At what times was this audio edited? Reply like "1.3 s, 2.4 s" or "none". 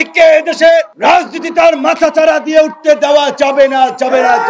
0.9 s